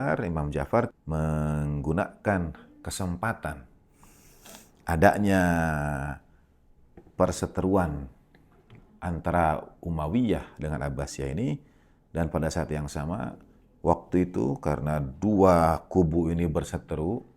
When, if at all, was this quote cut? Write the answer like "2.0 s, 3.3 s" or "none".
1.0 s

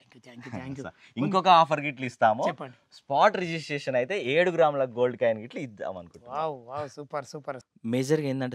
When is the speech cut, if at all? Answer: 7.6 s

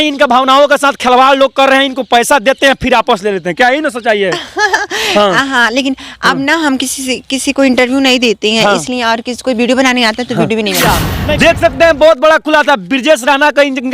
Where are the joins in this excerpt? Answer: 10.8 s

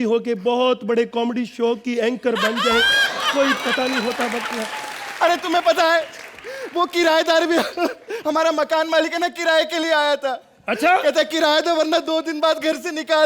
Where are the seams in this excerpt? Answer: none

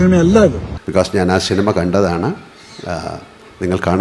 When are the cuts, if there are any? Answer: none

